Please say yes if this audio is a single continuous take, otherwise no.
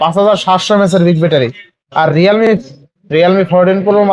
no